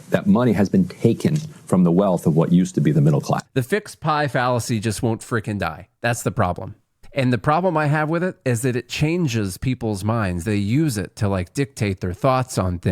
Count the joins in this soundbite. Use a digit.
2